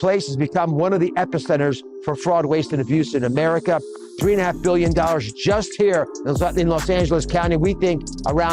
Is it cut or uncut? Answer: cut